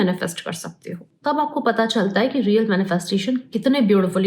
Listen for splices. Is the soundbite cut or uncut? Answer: cut